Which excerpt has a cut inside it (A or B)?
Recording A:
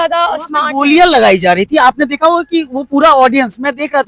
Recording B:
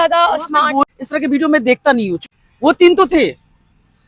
B